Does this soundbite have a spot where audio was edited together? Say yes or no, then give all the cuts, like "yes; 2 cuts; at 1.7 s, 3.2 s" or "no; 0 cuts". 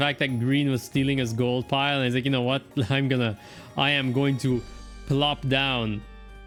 no; 0 cuts